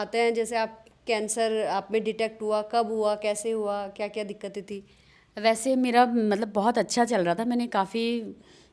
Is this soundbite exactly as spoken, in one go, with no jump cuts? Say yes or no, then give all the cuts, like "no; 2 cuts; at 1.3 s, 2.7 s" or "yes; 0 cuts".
no; 1 cut; at 5.2 s